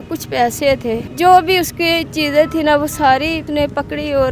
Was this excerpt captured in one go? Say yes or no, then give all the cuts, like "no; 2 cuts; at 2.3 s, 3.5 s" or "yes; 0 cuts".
no; 2 cuts; at 1.1 s, 3.4 s